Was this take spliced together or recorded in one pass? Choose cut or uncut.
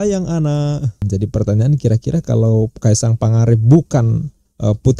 cut